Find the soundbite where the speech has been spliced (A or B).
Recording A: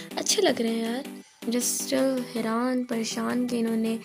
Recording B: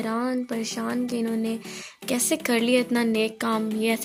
A